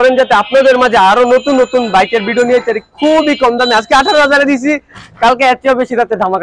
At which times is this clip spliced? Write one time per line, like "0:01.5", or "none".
none